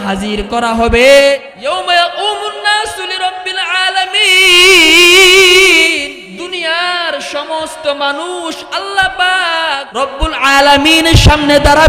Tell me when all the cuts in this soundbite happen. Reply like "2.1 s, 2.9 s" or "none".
1.5 s, 6.1 s, 9.9 s